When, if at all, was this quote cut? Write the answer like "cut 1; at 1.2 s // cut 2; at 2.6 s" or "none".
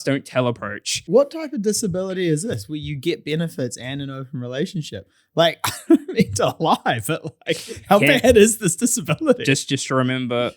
cut 1; at 0.9 s